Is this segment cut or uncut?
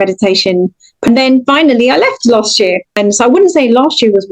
cut